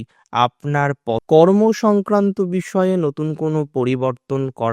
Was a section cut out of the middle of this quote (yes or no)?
yes